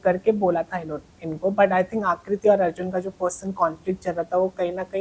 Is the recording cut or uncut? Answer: uncut